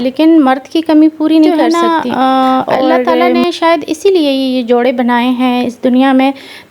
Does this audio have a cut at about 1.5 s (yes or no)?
yes